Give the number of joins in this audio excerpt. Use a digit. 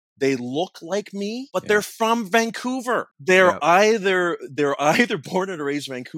2